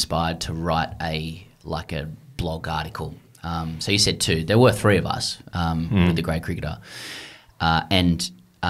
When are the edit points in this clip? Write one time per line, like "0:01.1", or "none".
none